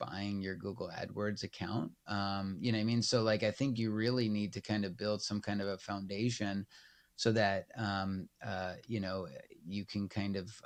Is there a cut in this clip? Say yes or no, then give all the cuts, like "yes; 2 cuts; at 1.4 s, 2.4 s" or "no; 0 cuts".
no; 0 cuts